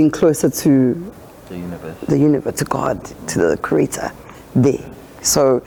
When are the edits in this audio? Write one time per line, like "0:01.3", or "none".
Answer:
none